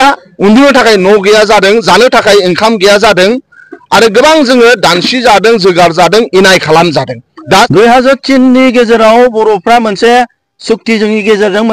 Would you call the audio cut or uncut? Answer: cut